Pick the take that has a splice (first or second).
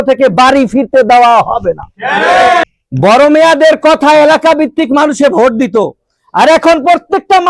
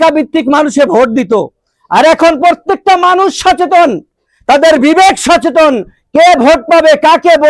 first